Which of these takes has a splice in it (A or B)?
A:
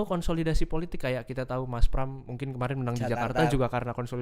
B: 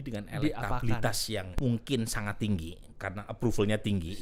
B